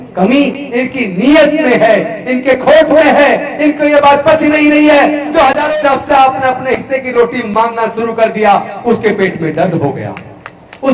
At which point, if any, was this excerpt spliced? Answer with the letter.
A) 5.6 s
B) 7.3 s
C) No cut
A